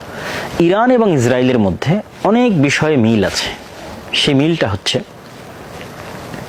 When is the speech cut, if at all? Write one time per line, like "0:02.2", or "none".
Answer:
none